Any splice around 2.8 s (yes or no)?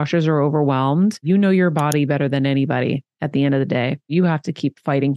no